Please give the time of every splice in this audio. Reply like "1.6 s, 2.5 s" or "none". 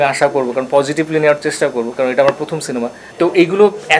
3.0 s